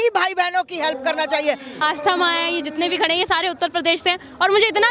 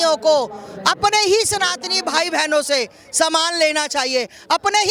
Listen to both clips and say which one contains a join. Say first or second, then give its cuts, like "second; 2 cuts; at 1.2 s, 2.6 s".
first; 1 cut; at 1.8 s